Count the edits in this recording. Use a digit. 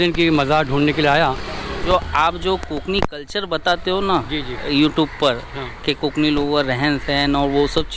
1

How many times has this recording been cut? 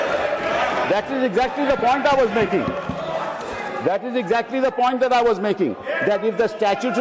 0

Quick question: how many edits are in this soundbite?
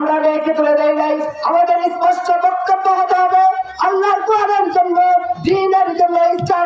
0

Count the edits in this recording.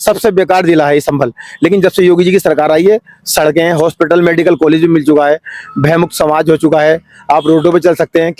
0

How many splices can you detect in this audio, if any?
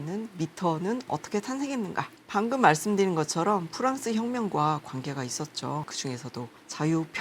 0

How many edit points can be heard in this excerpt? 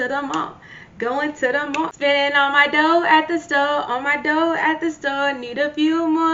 1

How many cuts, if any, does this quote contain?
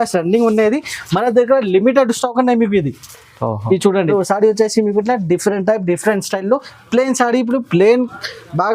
1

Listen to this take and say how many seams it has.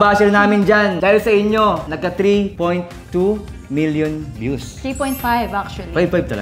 2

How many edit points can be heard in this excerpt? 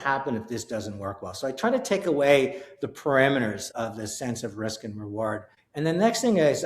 2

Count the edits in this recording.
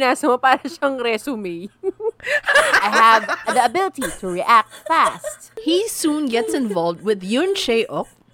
2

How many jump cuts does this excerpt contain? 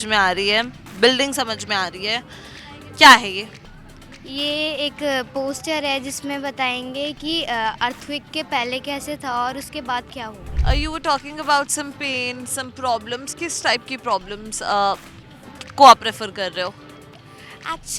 1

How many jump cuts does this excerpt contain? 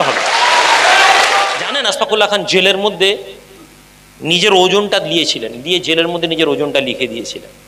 1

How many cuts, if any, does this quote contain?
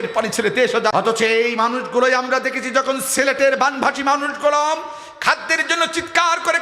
1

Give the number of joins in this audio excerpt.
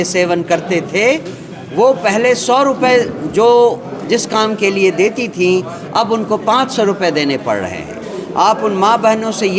0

